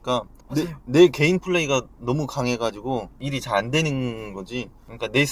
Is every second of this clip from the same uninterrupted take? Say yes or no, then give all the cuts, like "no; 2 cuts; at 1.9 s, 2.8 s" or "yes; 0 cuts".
no; 1 cut; at 3.2 s